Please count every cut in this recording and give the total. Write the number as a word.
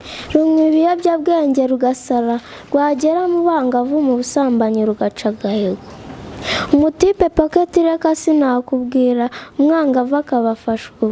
zero